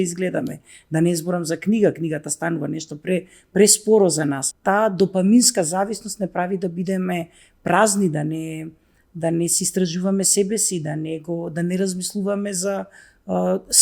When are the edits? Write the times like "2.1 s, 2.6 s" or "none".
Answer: 4.5 s